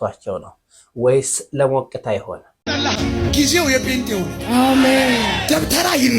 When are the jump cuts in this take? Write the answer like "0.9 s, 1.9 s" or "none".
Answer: 2.5 s